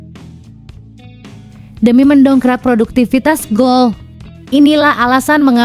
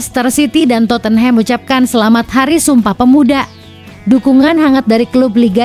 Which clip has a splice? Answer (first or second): first